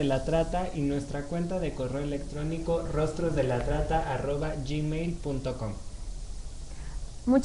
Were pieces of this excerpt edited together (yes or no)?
yes